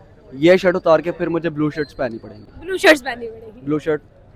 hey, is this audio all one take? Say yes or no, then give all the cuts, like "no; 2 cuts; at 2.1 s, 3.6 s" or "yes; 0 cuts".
yes; 0 cuts